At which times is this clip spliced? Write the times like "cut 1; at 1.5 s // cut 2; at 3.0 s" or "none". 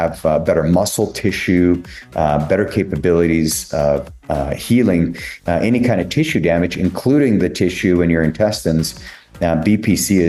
none

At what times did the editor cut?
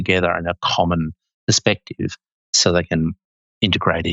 cut 1; at 2.5 s

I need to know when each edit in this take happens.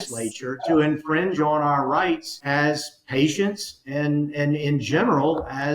cut 1; at 2.3 s

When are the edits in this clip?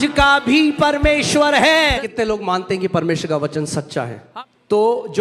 cut 1; at 1.9 s // cut 2; at 4.2 s

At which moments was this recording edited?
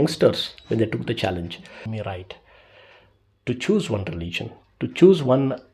cut 1; at 1.9 s

